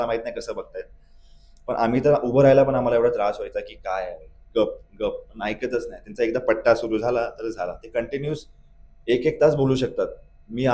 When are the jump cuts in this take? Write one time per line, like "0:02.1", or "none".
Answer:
none